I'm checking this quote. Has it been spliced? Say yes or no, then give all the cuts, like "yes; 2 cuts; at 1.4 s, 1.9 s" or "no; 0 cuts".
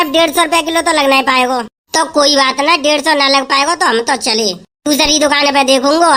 no; 0 cuts